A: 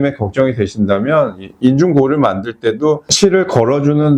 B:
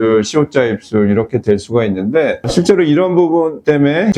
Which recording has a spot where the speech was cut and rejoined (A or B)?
B